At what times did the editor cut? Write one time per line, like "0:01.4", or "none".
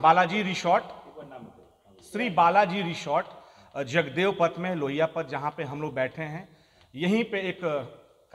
none